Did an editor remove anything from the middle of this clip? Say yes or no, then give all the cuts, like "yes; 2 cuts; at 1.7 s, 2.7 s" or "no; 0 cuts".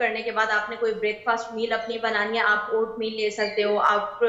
no; 0 cuts